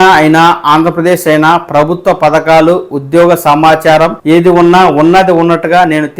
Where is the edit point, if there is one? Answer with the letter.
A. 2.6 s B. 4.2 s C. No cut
B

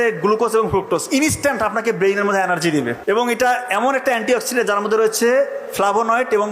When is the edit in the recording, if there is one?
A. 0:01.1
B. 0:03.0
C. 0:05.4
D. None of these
B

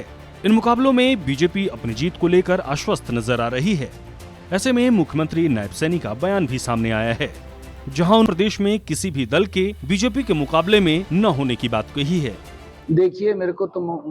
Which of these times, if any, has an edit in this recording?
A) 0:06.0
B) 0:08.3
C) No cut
B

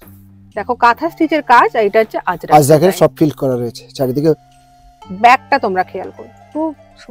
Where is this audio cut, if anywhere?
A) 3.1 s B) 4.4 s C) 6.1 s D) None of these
B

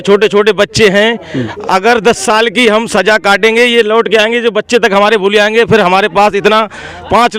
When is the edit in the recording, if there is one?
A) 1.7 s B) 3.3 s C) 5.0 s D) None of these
D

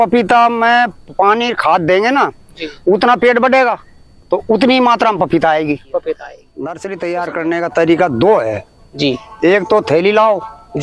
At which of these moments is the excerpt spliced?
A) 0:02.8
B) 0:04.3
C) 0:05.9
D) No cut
C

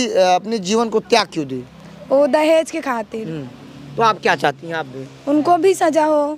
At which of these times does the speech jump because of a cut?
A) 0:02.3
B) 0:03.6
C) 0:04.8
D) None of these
D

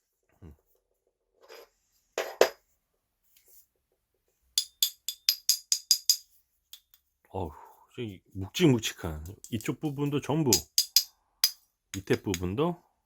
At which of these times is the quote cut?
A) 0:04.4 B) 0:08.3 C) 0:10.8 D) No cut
A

